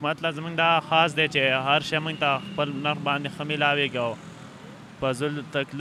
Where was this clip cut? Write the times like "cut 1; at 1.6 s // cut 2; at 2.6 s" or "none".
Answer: none

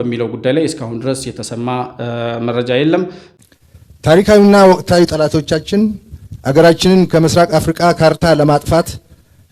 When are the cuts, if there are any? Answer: cut 1; at 3.2 s

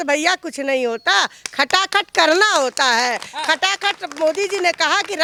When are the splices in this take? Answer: none

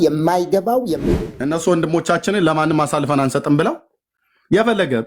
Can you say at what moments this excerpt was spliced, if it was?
cut 1; at 0.9 s

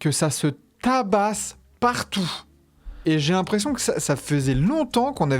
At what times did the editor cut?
cut 1; at 3.0 s

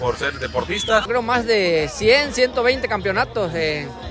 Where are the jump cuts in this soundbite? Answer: cut 1; at 1.1 s

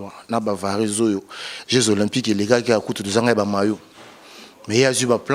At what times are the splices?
none

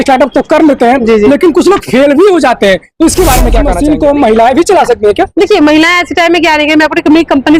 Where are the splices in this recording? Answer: cut 1; at 3.7 s

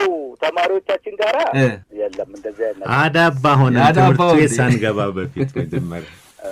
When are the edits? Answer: none

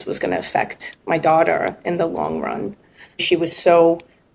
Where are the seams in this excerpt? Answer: cut 1; at 3.2 s

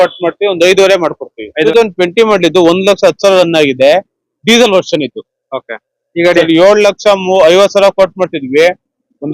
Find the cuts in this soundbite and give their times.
cut 1; at 1.6 s

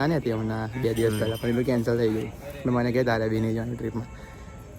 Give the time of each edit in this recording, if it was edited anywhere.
none

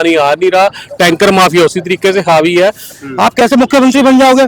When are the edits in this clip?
cut 1; at 2.9 s

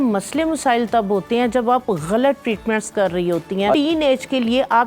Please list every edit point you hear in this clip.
cut 1; at 3.7 s

